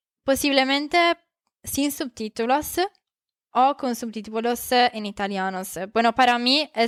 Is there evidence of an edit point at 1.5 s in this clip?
no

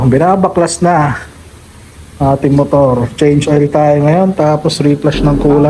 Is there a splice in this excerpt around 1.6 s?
no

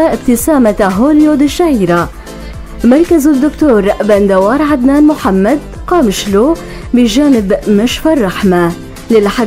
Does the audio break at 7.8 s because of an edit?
no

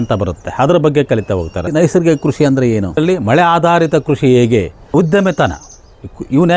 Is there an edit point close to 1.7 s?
yes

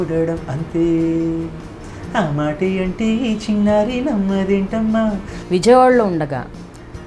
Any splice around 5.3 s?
yes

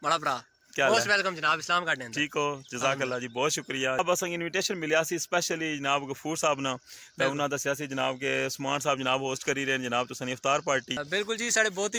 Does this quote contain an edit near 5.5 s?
no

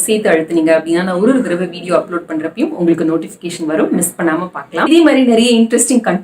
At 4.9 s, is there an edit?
yes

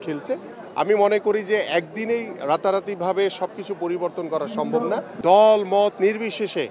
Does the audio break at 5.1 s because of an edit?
yes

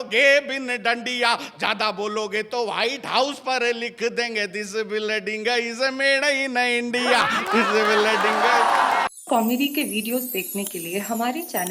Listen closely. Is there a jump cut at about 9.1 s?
yes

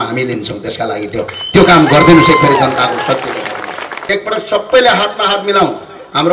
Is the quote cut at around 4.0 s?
yes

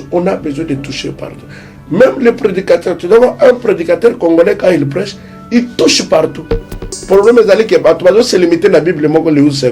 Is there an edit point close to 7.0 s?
yes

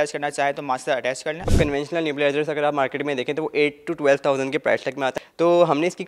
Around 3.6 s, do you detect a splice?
no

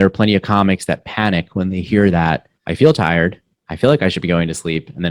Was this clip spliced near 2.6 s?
yes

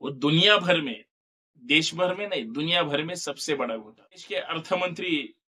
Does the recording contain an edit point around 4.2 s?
yes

